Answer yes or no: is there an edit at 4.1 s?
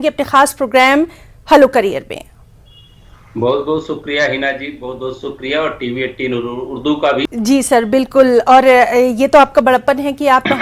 no